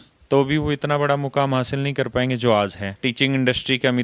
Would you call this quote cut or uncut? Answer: cut